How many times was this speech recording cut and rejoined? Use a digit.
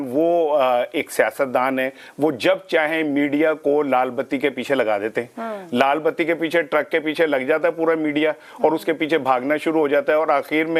0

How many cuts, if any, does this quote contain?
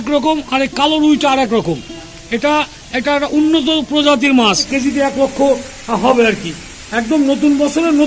1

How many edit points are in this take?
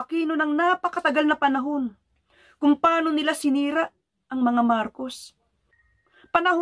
1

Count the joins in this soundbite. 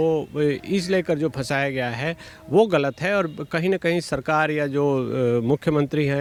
0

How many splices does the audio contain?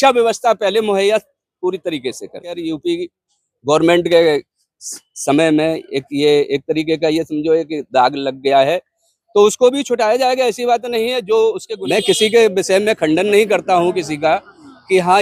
2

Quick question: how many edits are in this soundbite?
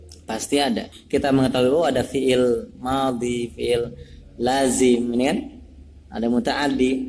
1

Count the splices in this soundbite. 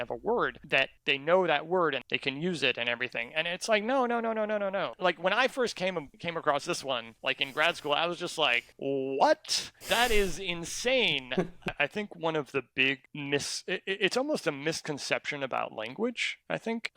4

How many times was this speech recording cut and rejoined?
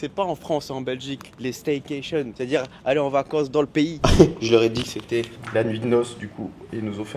1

